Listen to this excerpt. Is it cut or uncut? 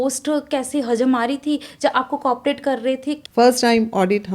cut